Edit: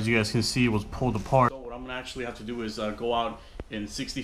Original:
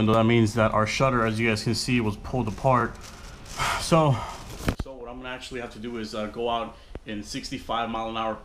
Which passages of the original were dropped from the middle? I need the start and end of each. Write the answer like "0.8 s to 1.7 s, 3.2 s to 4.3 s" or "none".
2.8 s to 4.9 s